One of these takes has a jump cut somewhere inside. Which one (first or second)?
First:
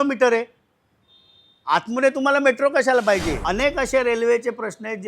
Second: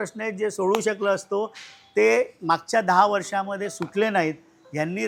first